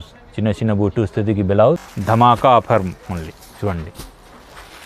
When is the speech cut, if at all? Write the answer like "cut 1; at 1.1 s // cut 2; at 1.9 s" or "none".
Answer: cut 1; at 1.9 s